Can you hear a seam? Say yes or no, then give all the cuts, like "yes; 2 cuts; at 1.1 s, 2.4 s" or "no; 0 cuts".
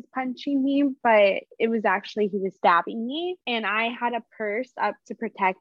yes; 2 cuts; at 1.9 s, 3.4 s